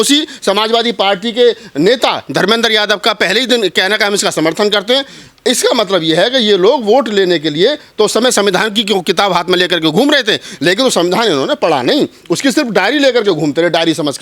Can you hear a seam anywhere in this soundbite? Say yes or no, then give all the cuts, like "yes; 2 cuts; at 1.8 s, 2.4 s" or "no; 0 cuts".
no; 0 cuts